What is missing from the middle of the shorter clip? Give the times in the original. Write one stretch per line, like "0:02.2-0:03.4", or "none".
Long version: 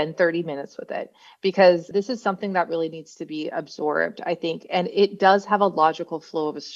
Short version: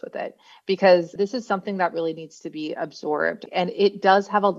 0:04.2-0:04.6